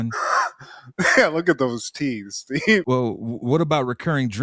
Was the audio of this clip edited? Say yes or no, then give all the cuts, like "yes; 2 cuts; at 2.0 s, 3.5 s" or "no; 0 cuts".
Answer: yes; 1 cut; at 2.8 s